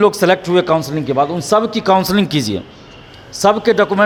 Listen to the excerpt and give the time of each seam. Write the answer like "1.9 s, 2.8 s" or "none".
none